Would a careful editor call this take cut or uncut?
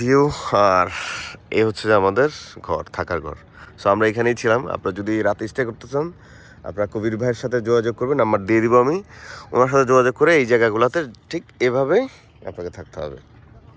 uncut